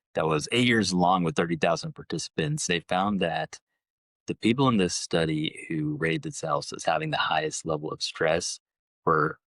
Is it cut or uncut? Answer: cut